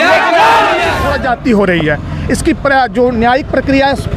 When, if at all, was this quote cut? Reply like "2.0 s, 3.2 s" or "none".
1.0 s